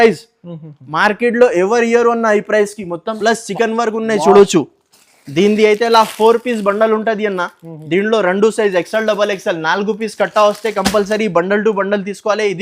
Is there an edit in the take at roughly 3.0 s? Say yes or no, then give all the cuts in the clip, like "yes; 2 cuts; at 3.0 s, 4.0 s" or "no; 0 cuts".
yes; 1 cut; at 3.0 s